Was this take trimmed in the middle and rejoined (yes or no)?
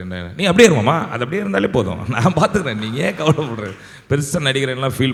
no